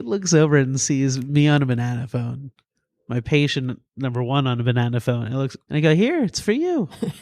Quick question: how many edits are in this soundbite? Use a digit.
0